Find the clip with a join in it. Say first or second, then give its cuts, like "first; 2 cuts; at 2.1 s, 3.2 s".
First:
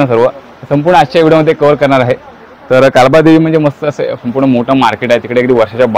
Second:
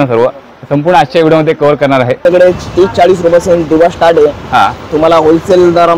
second; 1 cut; at 2.2 s